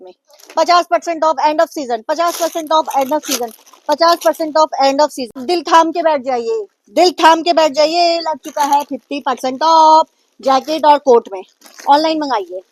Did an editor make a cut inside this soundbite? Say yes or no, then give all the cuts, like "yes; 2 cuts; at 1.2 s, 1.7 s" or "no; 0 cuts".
yes; 1 cut; at 5.4 s